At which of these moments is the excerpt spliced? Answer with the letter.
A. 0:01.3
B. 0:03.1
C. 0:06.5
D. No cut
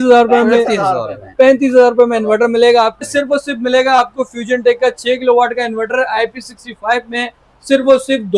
B